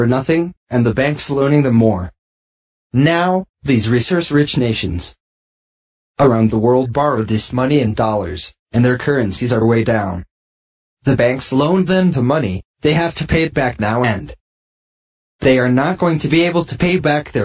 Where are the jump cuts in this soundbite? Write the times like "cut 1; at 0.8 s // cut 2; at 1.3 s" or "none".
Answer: none